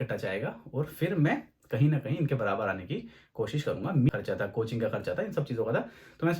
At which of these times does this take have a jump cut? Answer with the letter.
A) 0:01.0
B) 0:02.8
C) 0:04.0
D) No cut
C